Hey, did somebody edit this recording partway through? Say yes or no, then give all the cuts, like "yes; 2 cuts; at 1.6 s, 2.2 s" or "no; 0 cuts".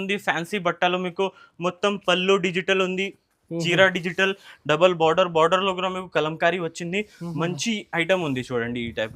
no; 0 cuts